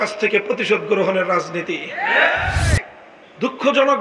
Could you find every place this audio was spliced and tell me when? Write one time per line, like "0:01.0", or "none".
0:02.7